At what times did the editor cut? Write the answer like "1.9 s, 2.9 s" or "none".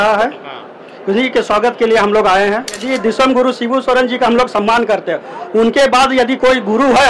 2.8 s